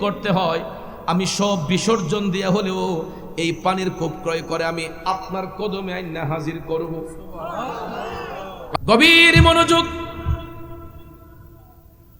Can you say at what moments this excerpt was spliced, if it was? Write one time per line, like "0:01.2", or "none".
0:08.8